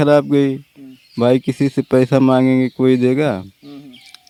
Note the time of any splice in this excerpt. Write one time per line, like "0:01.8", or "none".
none